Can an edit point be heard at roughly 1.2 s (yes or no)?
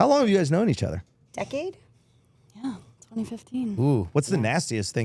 yes